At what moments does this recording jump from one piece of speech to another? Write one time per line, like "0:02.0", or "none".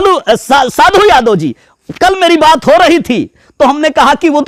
none